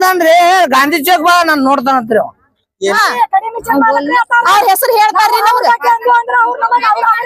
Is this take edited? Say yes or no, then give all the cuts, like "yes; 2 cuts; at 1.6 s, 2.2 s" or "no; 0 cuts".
yes; 1 cut; at 2.9 s